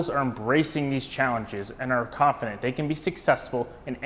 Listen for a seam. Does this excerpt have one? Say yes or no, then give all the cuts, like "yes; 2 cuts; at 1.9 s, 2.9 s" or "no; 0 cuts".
no; 0 cuts